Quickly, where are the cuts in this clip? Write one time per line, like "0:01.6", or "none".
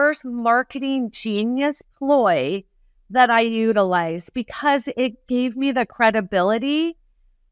none

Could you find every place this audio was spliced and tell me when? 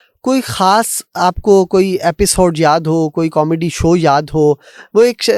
none

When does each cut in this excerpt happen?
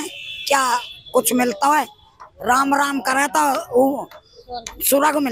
none

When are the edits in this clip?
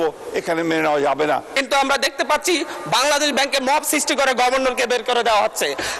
0:01.5

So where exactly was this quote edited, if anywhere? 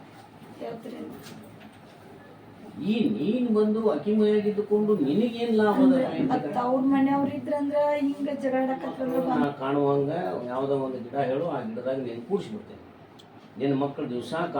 0:09.4

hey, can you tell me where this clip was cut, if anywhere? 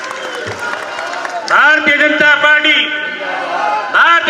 none

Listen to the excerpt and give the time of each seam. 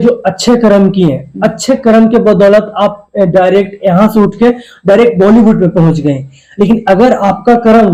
none

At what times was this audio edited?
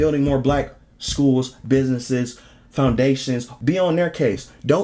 0:03.5

